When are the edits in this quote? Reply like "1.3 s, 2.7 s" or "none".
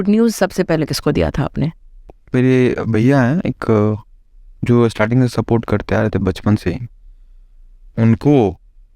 2.2 s